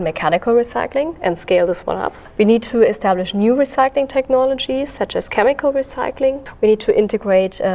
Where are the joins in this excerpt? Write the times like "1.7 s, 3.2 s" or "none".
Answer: 2.2 s, 6.5 s